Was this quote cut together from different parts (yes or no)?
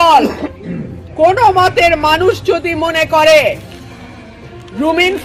no